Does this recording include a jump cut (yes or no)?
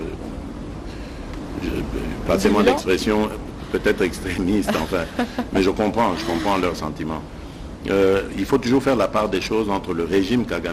no